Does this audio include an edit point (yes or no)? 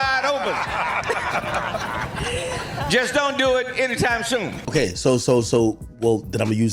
yes